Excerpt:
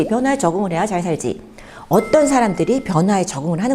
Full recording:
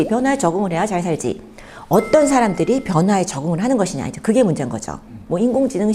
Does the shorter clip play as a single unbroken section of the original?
yes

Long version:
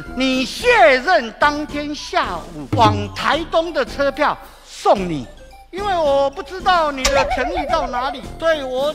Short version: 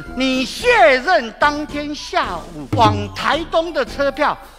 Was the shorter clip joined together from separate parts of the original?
no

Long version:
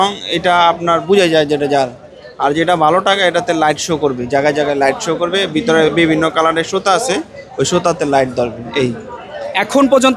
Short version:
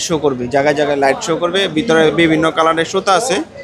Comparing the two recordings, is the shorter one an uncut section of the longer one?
yes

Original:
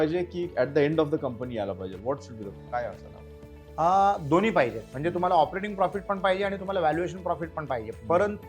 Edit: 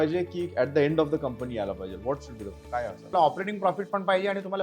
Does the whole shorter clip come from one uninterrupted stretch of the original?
no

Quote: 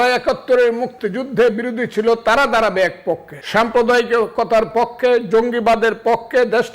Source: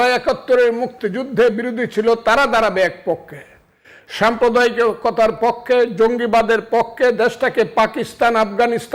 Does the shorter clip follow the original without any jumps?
no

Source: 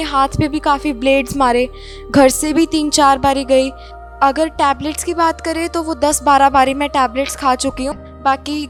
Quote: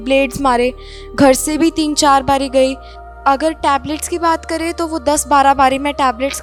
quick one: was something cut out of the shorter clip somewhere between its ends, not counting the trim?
no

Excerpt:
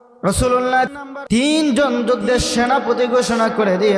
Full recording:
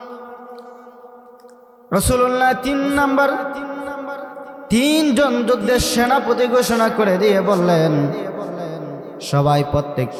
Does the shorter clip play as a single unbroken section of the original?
no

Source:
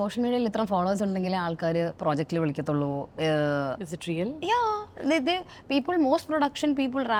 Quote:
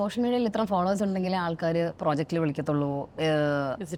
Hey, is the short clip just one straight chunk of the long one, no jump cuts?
yes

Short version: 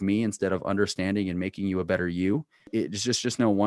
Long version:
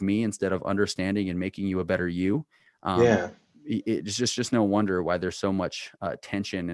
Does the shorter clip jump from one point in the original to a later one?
yes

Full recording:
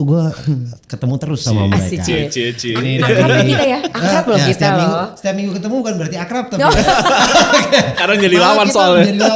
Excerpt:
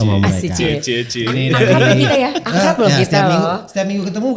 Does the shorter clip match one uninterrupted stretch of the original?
yes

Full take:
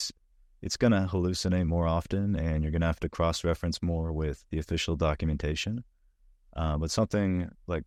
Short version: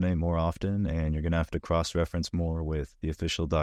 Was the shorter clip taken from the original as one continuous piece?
yes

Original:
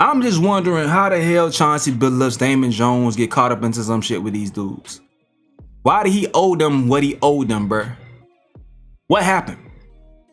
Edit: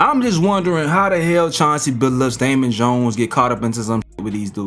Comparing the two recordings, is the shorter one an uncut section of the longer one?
yes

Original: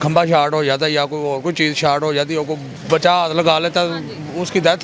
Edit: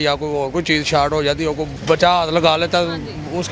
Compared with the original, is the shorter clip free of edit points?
no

